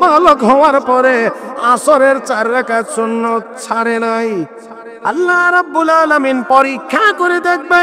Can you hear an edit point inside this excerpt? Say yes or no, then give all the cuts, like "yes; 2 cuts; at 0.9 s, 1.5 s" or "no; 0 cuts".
yes; 1 cut; at 4.9 s